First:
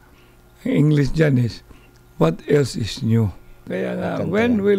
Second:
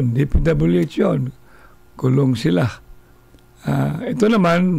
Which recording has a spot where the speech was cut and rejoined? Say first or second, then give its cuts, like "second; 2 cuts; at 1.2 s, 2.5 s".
first; 1 cut; at 3.7 s